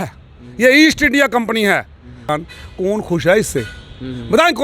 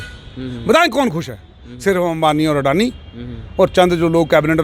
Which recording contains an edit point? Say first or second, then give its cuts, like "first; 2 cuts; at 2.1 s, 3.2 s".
first; 1 cut; at 2.3 s